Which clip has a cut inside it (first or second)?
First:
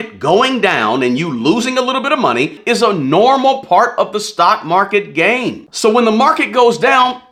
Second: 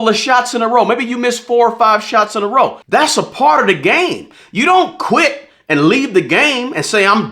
second